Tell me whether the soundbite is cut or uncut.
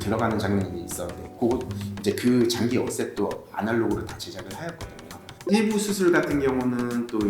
cut